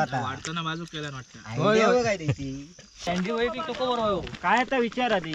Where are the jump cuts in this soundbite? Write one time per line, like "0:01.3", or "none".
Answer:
0:03.0